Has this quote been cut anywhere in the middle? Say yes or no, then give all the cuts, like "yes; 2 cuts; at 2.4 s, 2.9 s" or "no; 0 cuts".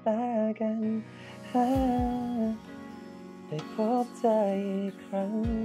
no; 0 cuts